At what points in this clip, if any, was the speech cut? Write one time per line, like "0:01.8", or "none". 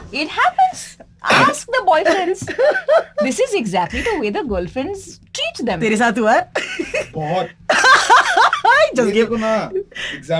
none